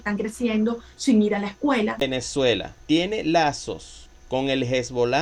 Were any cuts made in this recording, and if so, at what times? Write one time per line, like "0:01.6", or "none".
0:02.0